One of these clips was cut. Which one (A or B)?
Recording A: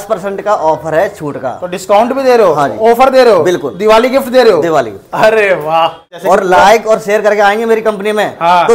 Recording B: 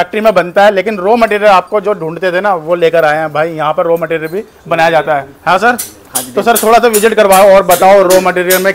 A